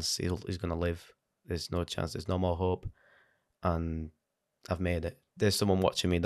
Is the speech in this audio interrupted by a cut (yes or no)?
yes